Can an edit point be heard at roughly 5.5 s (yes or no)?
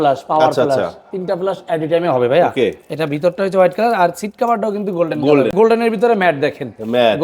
yes